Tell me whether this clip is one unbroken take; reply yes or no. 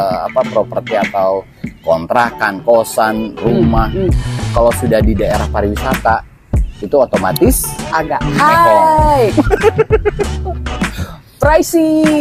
yes